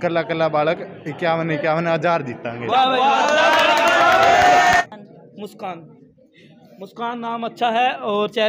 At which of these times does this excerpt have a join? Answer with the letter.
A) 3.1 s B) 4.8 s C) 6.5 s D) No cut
B